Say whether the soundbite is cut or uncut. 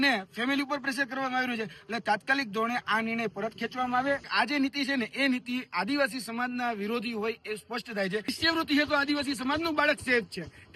cut